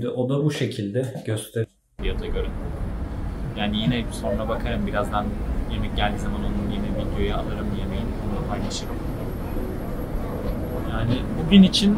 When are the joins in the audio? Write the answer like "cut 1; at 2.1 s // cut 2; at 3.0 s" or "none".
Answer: cut 1; at 1.9 s

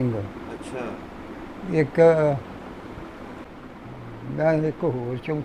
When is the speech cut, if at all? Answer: none

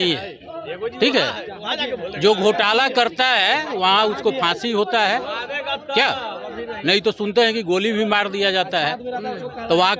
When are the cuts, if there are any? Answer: none

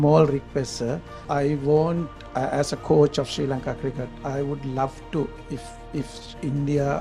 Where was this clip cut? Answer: cut 1; at 1.1 s

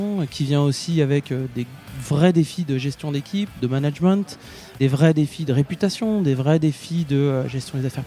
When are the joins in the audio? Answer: none

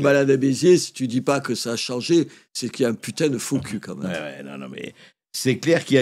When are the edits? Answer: none

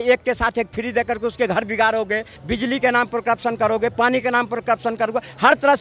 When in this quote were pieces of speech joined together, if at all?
cut 1; at 2.4 s

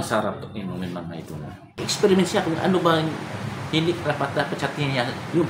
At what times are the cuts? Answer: cut 1; at 1.8 s

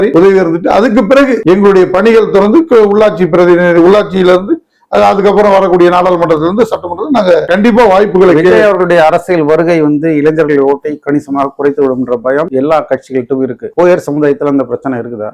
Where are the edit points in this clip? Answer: none

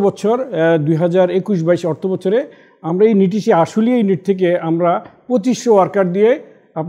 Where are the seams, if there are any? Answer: none

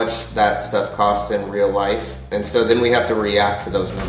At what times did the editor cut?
cut 1; at 2.3 s

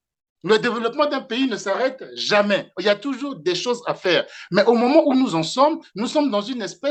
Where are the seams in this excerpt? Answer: none

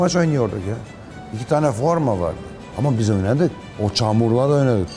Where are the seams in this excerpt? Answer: none

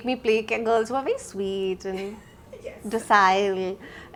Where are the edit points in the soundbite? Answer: none

